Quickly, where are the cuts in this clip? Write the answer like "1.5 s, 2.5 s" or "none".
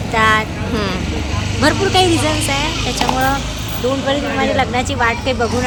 none